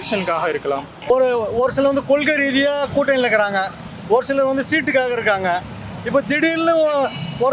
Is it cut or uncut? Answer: cut